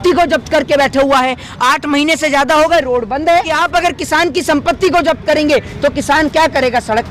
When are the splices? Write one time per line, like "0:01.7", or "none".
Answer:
0:03.5